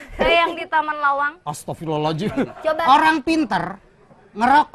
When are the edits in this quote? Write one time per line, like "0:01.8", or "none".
0:02.8